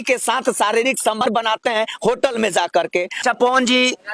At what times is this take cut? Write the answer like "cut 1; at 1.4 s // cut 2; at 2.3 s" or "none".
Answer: cut 1; at 1.2 s // cut 2; at 3.1 s